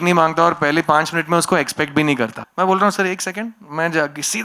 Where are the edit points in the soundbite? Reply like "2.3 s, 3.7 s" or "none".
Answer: 2.4 s

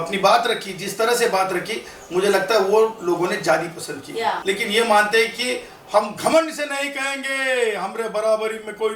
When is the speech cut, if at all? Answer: 4.4 s

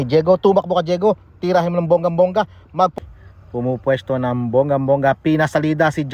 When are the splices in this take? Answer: 2.9 s

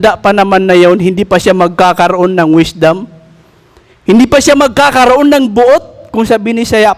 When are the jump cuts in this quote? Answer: none

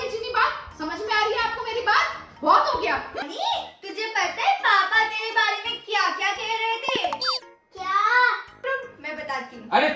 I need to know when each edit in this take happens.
3.3 s, 8.6 s

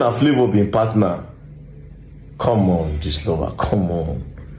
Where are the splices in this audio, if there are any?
none

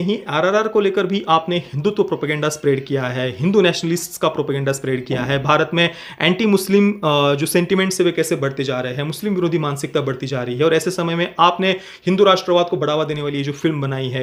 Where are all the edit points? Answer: none

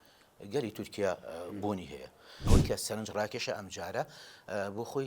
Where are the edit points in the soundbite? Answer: 2.3 s

